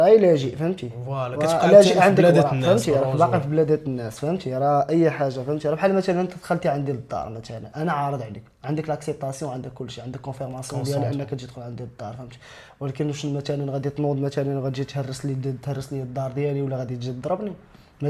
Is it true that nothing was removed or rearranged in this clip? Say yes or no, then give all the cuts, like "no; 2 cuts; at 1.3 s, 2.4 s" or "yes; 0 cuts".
yes; 0 cuts